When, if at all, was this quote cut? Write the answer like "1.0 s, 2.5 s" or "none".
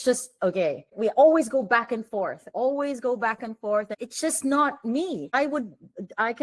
0.9 s, 3.9 s, 5.3 s